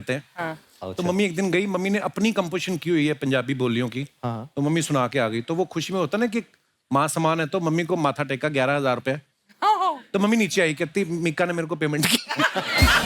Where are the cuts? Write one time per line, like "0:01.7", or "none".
none